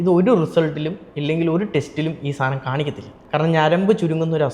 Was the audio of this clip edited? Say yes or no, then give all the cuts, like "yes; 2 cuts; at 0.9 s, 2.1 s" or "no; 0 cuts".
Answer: yes; 1 cut; at 3.2 s